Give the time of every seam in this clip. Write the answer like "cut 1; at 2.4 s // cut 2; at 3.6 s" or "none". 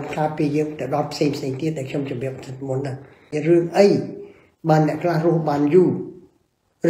cut 1; at 3.3 s